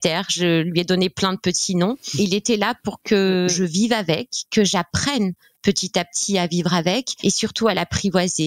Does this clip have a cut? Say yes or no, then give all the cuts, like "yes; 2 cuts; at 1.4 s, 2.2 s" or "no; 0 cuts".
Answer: yes; 3 cuts; at 2.1 s, 3.5 s, 7.1 s